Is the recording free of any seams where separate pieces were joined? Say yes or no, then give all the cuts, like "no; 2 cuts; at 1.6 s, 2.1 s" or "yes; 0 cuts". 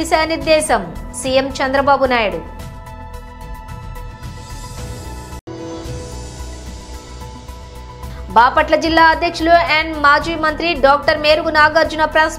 yes; 0 cuts